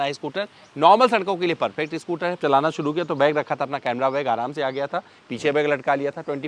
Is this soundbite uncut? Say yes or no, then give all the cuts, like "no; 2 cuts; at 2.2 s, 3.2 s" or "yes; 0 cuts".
no; 1 cut; at 2.4 s